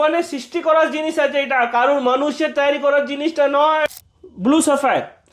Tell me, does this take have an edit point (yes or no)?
yes